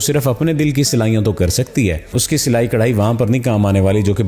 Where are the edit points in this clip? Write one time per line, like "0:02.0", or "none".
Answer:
0:02.1